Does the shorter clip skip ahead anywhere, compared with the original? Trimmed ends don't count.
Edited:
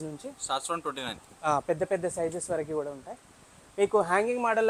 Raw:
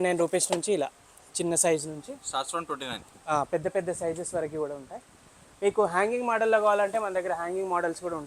no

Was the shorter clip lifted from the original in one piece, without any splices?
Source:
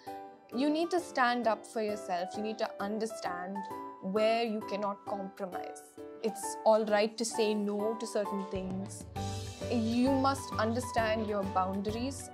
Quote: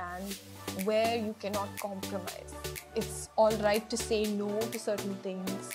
yes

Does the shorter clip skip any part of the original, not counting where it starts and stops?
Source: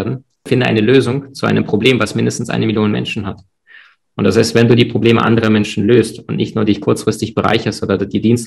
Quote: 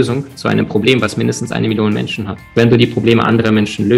yes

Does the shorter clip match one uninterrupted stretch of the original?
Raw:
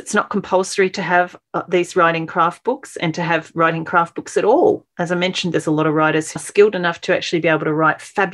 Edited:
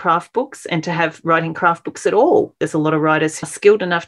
no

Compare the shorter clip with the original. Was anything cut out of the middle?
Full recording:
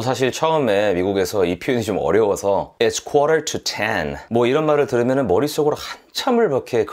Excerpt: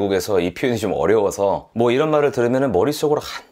yes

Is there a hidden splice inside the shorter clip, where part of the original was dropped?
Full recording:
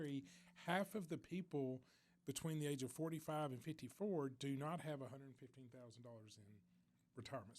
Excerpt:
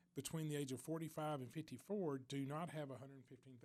no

